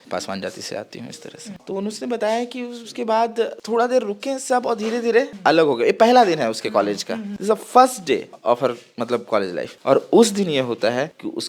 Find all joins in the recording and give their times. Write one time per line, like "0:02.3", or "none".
0:01.6